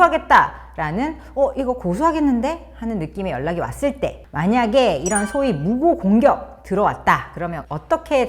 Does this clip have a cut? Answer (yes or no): yes